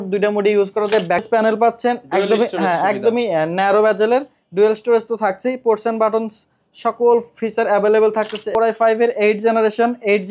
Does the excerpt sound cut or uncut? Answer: cut